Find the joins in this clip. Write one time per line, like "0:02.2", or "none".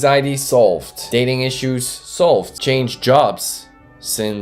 0:00.9
0:02.5